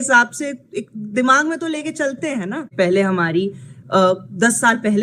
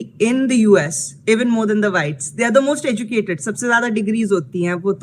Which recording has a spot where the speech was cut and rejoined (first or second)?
first